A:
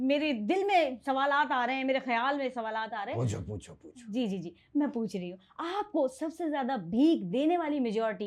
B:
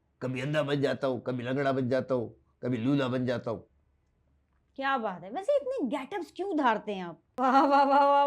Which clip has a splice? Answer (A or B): B